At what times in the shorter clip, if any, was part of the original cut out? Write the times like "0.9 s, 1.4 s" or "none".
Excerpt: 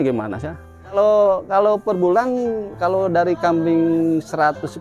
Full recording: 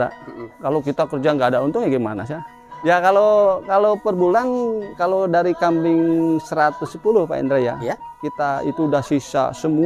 1.0 s